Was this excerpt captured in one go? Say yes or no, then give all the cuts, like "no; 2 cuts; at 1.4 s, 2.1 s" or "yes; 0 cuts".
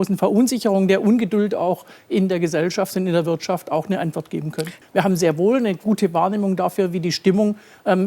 no; 1 cut; at 4.7 s